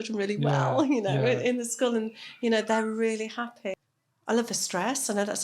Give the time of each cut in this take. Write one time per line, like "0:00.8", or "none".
0:03.8